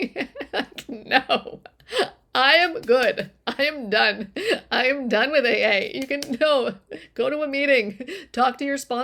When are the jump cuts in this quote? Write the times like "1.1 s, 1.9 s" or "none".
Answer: none

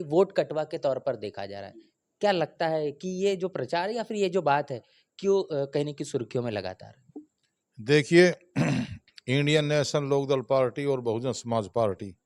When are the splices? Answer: none

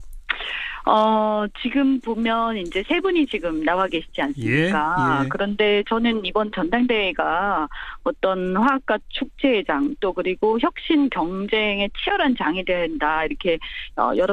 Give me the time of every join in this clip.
11.3 s

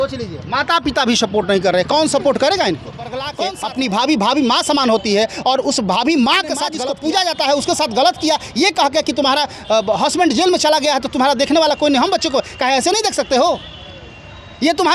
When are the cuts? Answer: 3.3 s, 6.7 s

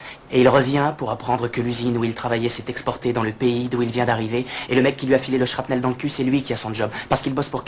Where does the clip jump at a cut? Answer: none

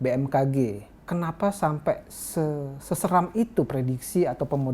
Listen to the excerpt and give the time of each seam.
0.9 s

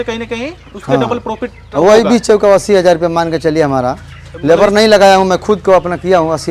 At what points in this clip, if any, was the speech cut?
none

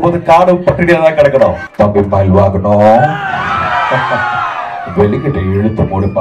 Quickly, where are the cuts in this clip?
1.6 s

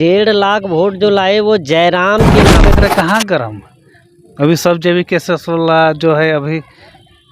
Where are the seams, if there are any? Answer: 2.6 s

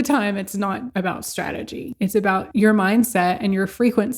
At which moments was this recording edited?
0.9 s, 2.2 s

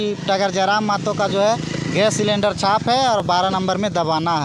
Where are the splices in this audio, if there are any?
none

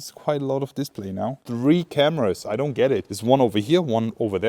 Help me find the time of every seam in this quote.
1.4 s

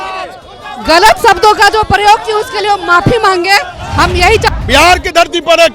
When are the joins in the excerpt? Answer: 4.5 s

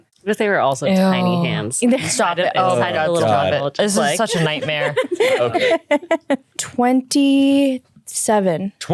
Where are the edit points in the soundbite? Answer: 6.6 s

